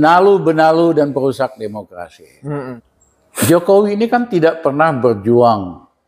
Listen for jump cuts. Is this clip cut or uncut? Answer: cut